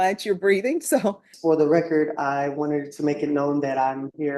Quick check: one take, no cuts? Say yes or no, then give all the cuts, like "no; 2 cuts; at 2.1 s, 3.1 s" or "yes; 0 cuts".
no; 1 cut; at 1.3 s